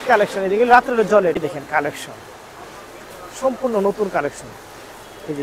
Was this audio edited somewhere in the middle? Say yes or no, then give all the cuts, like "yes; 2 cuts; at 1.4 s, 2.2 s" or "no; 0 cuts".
yes; 1 cut; at 1.5 s